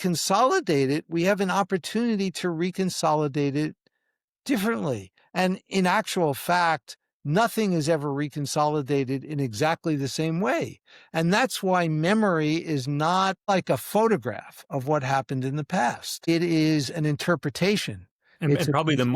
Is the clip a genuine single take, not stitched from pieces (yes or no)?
no